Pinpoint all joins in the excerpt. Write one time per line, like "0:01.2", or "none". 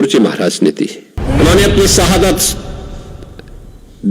0:01.2